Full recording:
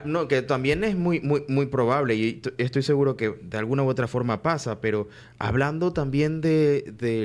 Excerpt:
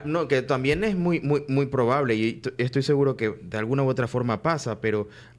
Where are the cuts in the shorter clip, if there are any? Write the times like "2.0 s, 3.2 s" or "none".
none

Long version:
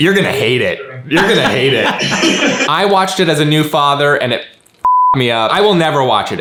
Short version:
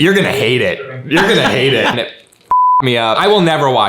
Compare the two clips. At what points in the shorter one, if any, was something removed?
2.0 s

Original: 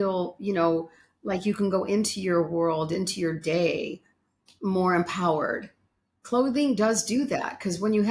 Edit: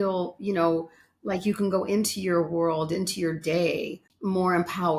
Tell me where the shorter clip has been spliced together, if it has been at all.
4.0 s

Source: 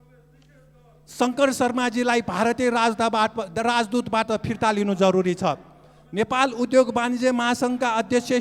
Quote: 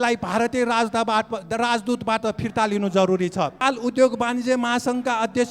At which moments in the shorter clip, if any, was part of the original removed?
3.6 s

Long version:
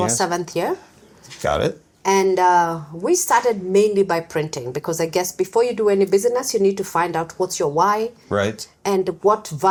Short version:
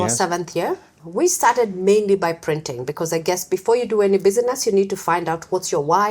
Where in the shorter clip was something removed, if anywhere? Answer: 1.0 s

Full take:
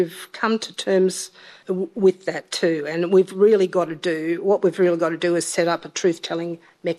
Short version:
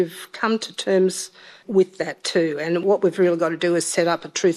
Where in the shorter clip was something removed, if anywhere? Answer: 1.6 s, 2.8 s

